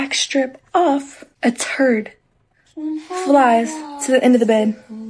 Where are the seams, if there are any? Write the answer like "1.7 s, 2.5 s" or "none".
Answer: 1.2 s